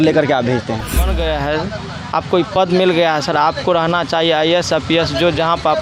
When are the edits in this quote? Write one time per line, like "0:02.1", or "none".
0:01.1